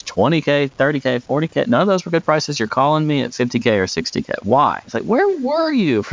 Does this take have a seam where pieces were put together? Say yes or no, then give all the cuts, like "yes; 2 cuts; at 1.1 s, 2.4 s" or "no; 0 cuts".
yes; 1 cut; at 5.1 s